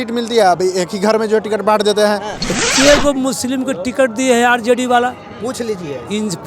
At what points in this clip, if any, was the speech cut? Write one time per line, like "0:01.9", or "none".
0:02.4